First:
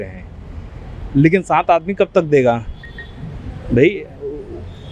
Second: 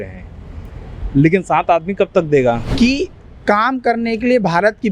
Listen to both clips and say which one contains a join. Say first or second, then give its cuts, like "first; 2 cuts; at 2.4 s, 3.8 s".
second; 1 cut; at 2.7 s